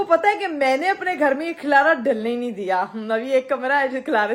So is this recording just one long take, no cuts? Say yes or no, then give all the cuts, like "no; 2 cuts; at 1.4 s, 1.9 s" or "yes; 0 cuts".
yes; 0 cuts